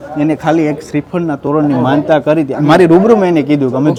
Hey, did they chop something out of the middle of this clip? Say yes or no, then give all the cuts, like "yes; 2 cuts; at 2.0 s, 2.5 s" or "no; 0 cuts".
no; 0 cuts